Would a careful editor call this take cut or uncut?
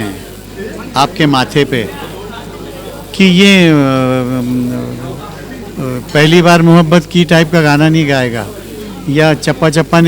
uncut